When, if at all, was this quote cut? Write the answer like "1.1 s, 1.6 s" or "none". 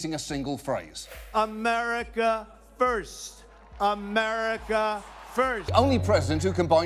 1.2 s, 5.7 s